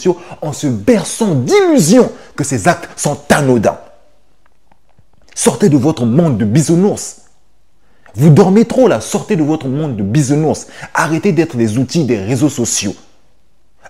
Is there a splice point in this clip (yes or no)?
no